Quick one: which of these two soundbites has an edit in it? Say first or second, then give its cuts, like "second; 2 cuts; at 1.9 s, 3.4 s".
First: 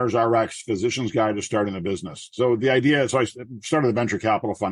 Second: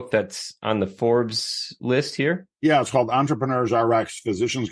second; 1 cut; at 2.5 s